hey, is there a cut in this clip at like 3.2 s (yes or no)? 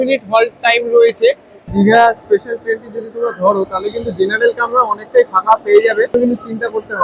no